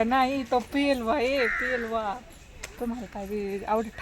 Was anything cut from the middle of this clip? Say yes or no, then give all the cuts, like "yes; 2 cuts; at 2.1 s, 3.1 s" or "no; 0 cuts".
no; 0 cuts